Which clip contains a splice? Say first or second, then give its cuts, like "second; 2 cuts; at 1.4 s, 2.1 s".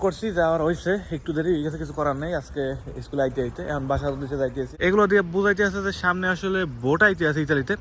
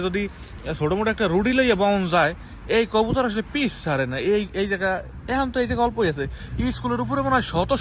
first; 1 cut; at 4.7 s